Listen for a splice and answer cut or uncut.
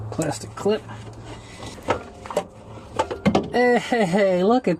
cut